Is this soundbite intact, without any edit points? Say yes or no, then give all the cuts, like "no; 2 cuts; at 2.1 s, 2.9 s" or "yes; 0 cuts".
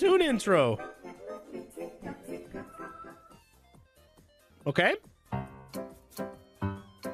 yes; 0 cuts